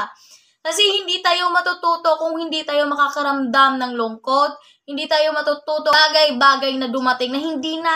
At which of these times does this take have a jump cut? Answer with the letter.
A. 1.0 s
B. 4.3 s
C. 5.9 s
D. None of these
C